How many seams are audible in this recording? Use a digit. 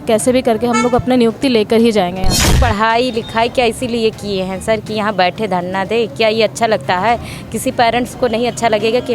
1